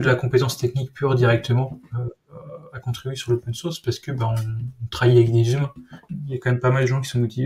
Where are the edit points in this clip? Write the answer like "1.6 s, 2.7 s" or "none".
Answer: 6.0 s